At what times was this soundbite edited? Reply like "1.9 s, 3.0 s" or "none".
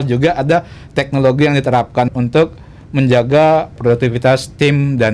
2.1 s, 3.8 s